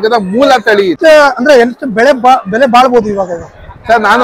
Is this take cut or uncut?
cut